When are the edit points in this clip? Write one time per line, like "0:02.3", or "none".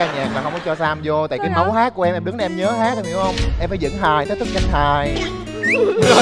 none